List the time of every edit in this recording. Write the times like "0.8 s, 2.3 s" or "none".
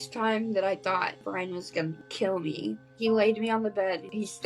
1.2 s, 2.9 s